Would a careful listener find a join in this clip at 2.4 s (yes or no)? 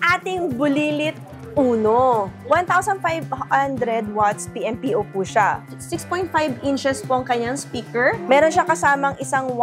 yes